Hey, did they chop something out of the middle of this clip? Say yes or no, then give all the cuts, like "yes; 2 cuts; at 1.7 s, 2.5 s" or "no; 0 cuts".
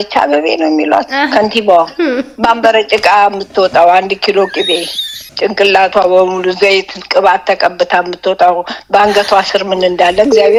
no; 0 cuts